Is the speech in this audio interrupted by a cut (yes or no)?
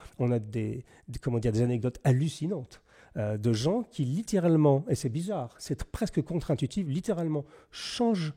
no